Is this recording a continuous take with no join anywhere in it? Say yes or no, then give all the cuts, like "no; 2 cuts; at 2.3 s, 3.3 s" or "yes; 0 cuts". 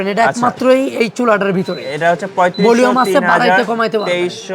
yes; 0 cuts